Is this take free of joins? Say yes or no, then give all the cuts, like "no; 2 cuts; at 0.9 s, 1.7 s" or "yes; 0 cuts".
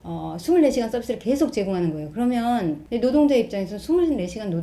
no; 1 cut; at 2.8 s